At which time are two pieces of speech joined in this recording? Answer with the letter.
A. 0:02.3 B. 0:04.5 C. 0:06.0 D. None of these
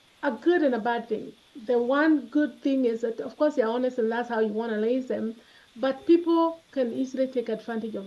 D